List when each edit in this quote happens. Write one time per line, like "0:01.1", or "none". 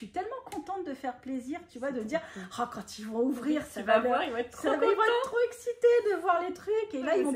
none